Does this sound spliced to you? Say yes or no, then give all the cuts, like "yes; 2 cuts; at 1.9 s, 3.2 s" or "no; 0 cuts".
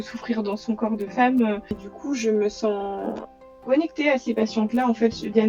yes; 1 cut; at 1.9 s